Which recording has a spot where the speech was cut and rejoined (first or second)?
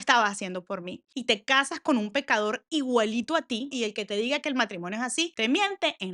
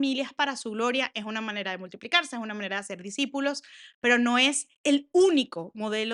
first